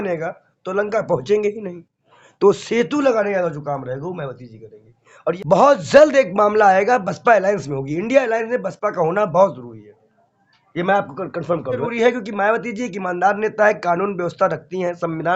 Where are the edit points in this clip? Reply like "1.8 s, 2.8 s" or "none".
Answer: 5.4 s, 11.8 s